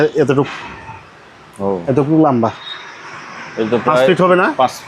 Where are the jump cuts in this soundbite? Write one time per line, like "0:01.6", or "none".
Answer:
none